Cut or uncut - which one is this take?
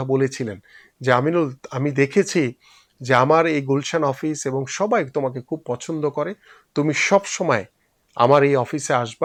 uncut